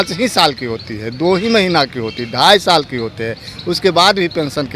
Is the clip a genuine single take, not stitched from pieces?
yes; 0 cuts

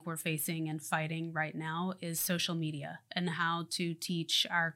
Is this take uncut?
yes; 0 cuts

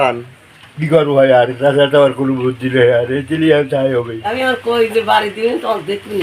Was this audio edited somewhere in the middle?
yes; 1 cut; at 4.2 s

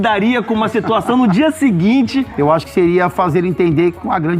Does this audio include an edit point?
yes; 1 cut; at 2.3 s

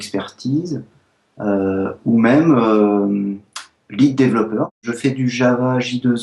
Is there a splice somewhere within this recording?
yes; 1 cut; at 4.8 s

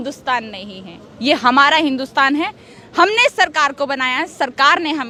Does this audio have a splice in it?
no; 0 cuts

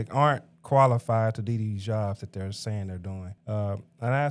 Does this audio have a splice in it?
yes; 1 cut; at 3.3 s

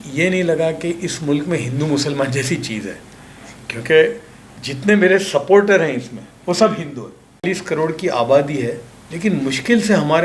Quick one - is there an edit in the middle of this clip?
yes; 1 cut; at 7.4 s

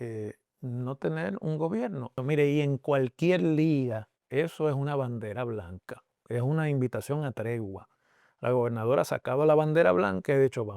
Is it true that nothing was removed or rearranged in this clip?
no; 1 cut; at 2.1 s

